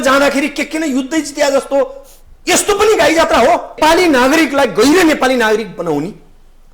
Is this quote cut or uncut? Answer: cut